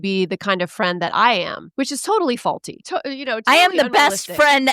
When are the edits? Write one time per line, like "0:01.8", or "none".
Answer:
0:01.6
0:02.7